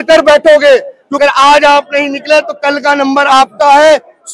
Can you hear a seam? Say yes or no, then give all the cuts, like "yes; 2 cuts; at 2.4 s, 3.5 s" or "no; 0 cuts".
yes; 1 cut; at 1.0 s